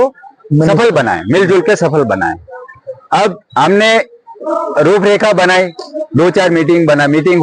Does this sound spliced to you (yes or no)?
no